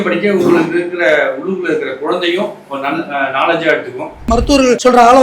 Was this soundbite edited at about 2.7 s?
no; 1 cut; at 4.3 s

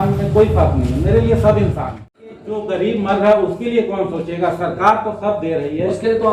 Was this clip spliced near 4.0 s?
no; 1 cut; at 2.5 s

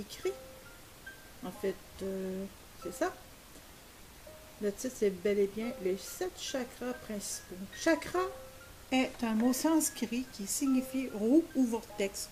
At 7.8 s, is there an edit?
no; 1 cut; at 6.4 s

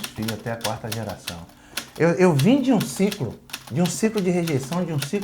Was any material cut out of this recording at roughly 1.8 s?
yes; 1 cut; at 1.8 s

